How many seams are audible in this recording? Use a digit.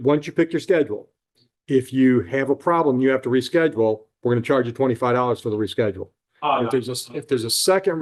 0